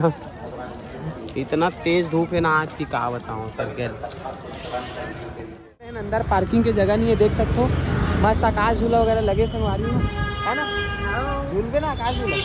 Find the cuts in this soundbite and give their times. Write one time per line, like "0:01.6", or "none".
0:06.0

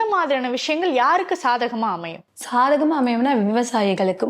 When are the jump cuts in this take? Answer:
none

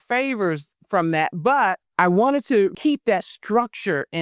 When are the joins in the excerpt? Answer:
0:01.8
0:02.8

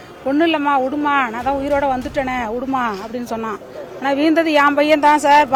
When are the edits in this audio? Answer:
none

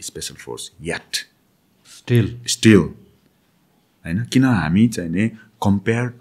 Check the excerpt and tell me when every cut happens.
none

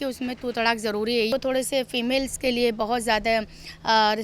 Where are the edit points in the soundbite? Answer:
0:01.3

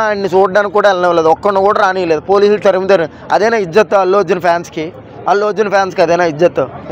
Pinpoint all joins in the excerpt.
none

